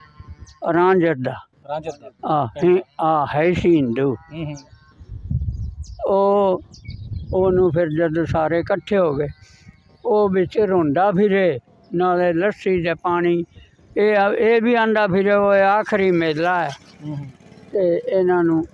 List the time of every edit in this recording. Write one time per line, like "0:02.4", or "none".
none